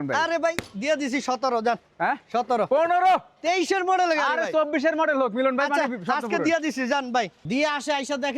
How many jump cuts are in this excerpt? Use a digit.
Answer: 1